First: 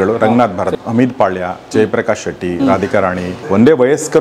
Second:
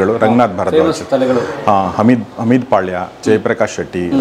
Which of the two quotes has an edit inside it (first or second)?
first